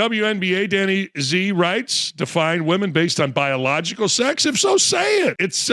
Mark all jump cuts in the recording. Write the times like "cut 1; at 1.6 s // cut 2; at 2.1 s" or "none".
none